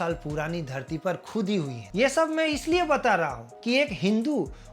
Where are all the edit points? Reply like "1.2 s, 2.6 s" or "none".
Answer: 1.8 s